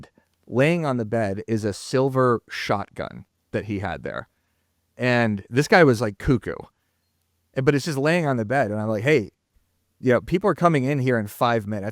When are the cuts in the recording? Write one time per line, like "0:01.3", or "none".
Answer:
none

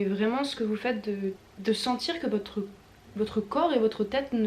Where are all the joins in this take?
none

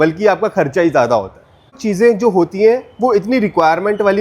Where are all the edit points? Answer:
0:01.7

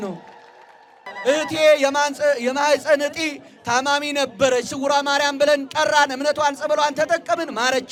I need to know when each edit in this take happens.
none

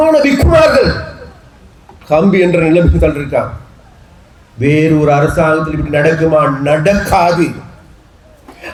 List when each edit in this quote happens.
none

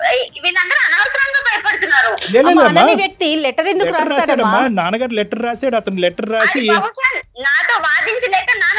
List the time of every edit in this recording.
none

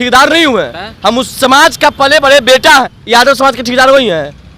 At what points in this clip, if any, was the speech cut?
0:03.0

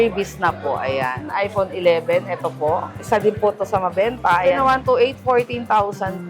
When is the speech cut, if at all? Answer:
0:01.3
0:04.6

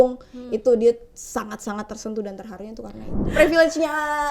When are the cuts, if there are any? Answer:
0:03.2

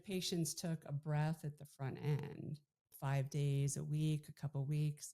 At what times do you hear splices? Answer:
0:02.9

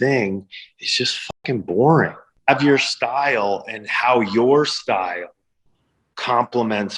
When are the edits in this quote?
0:02.2

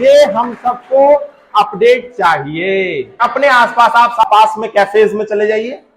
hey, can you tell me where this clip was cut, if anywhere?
0:03.1
0:04.3

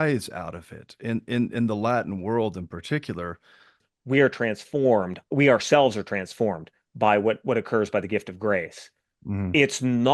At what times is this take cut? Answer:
0:03.9

